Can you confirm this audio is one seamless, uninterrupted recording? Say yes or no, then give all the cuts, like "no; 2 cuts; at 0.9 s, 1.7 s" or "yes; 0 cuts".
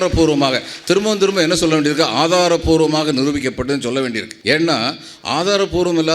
no; 1 cut; at 4.3 s